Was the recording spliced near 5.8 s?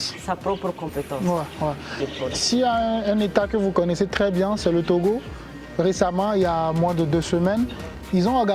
no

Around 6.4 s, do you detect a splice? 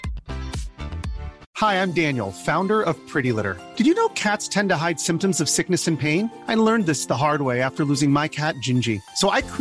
no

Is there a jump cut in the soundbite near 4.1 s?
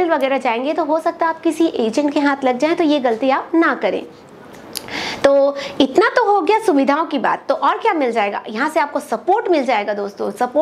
no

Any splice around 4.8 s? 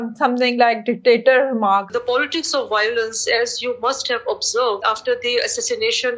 yes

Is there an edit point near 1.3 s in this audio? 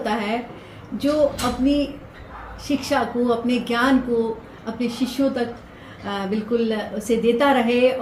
no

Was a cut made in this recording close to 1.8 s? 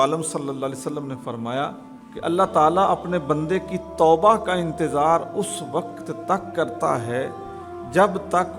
no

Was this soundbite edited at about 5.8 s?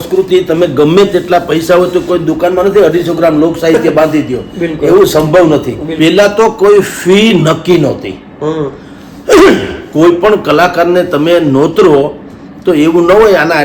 yes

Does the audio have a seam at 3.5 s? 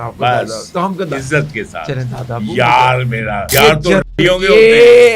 yes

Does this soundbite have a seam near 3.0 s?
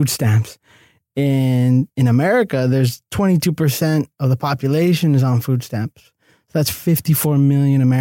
yes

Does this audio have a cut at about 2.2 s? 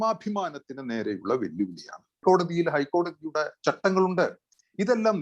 yes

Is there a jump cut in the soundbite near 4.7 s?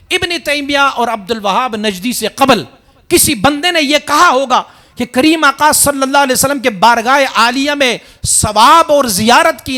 no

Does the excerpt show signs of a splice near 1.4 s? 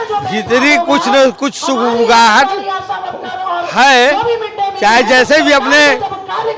no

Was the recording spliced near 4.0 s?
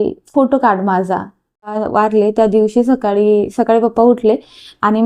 no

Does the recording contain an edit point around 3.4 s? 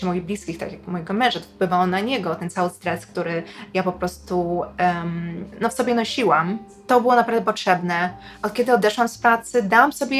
no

